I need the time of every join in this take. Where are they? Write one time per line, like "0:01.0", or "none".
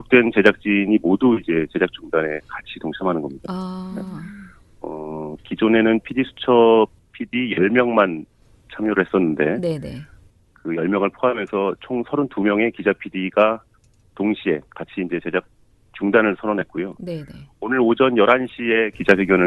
none